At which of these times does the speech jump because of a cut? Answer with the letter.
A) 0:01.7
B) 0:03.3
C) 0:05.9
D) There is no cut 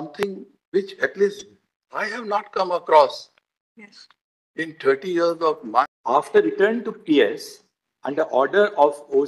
C